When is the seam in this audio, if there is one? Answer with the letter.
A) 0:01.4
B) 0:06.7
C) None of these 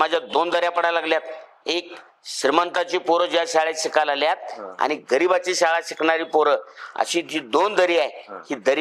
C